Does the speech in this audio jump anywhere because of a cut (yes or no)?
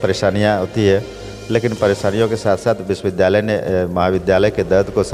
no